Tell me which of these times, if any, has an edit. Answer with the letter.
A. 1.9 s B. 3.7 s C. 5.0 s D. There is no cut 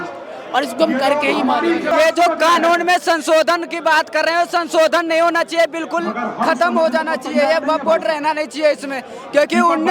A